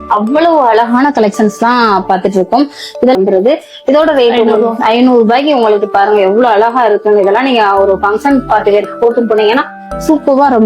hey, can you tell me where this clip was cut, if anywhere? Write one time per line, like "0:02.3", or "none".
0:03.2

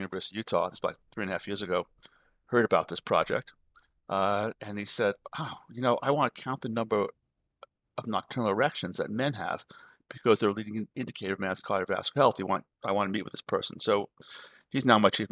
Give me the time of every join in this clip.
none

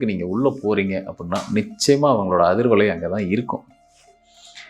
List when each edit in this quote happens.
none

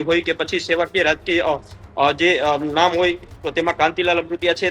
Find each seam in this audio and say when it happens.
none

